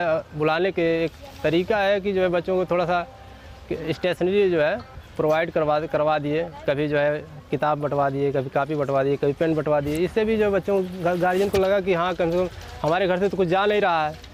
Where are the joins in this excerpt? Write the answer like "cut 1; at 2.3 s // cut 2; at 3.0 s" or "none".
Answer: none